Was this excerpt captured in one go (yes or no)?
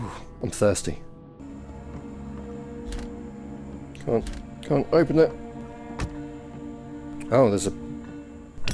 no